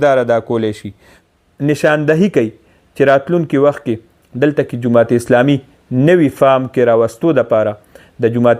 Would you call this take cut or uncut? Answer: cut